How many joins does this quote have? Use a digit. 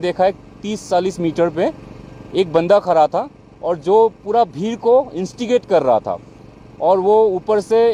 0